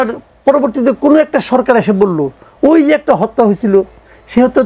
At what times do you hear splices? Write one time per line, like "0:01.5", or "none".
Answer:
none